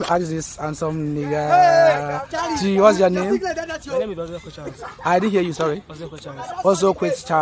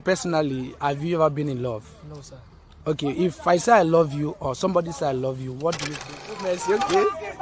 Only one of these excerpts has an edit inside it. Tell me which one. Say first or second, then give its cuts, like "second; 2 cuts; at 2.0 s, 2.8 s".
second; 1 cut; at 6.4 s